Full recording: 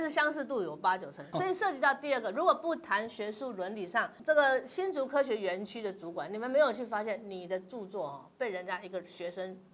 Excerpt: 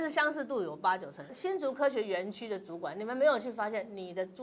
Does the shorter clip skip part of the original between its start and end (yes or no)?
yes